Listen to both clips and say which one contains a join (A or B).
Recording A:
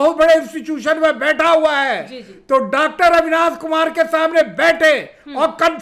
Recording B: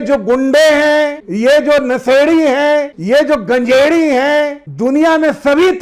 B